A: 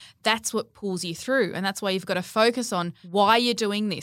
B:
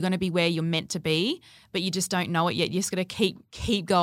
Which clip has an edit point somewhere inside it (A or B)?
A